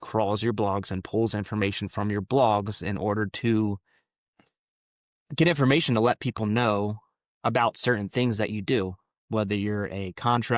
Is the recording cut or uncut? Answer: uncut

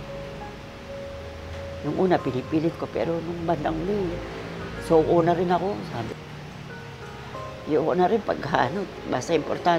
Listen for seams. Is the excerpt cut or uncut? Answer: cut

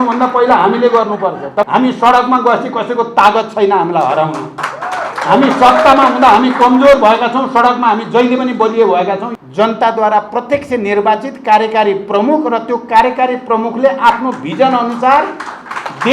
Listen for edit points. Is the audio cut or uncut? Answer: cut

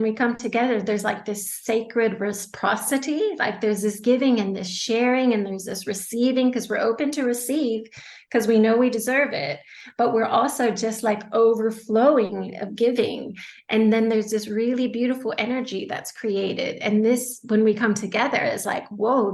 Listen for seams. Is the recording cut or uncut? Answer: uncut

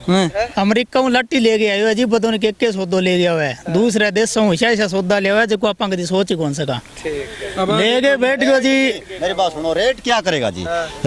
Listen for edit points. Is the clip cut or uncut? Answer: uncut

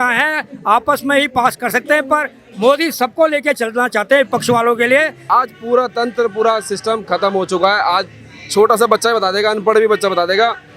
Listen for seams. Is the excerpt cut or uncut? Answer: cut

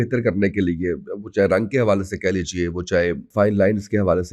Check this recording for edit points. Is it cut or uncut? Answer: cut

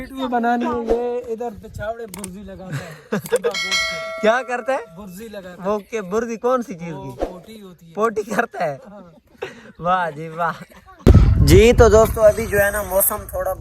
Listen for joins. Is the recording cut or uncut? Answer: cut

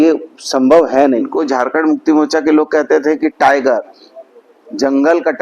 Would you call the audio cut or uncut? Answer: cut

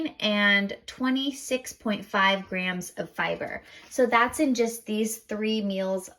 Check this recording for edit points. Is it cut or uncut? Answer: uncut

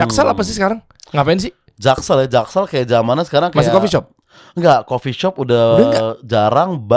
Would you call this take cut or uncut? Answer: uncut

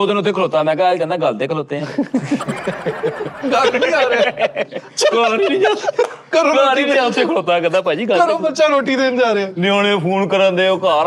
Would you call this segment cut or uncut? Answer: uncut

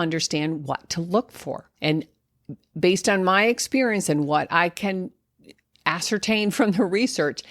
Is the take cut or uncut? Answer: cut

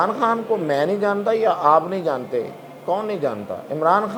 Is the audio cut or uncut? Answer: uncut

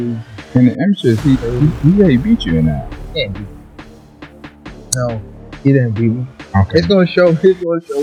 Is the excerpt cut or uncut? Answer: uncut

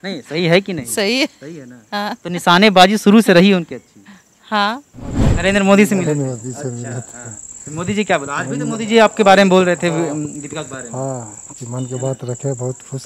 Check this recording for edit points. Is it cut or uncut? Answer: cut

